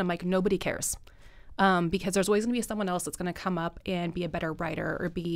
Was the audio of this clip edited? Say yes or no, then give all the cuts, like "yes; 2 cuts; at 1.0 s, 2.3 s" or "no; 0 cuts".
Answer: no; 0 cuts